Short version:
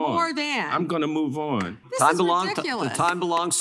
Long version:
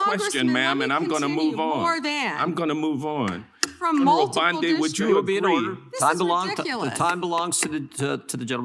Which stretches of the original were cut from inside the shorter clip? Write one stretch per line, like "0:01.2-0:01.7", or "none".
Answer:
0:03.5-0:05.8